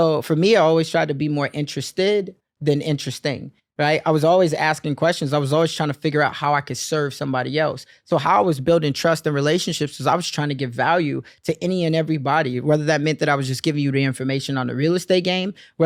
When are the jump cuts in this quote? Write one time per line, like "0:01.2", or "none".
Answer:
none

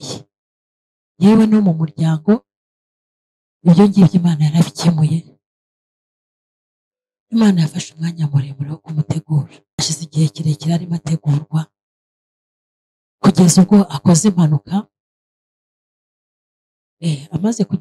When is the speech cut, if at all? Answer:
0:09.8

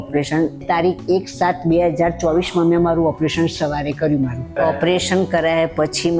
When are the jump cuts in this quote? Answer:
0:04.5

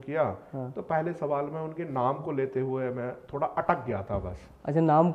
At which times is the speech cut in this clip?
none

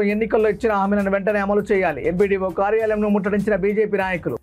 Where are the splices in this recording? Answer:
none

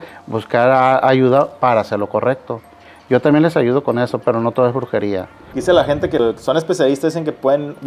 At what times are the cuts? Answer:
0:05.4
0:06.2

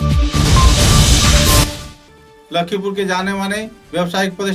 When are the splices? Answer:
0:01.8

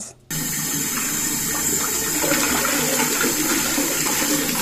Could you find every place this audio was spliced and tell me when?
none

